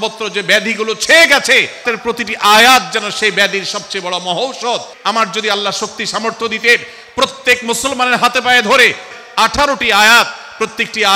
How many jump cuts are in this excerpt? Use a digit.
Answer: 3